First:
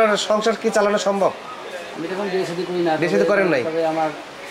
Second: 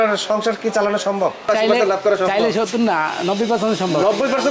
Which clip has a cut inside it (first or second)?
second